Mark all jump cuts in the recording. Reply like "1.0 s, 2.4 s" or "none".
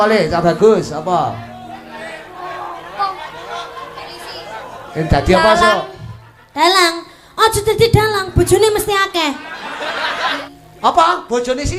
10.5 s